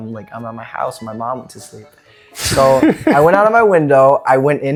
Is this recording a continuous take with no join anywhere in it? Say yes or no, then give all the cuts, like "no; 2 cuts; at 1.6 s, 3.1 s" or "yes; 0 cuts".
yes; 0 cuts